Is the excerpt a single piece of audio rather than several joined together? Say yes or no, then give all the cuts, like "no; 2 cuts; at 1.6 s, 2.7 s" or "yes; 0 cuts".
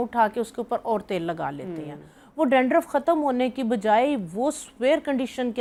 yes; 0 cuts